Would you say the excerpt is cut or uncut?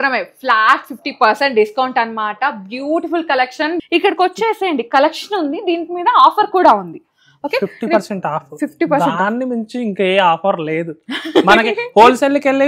cut